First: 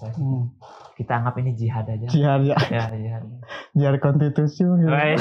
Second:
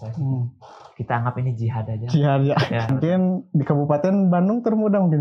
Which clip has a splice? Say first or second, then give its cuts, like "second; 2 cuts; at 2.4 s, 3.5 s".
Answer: second; 1 cut; at 2.9 s